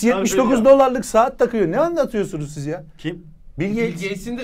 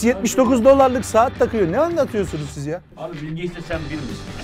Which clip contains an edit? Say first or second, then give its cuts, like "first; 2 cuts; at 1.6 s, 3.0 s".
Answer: second; 1 cut; at 2.9 s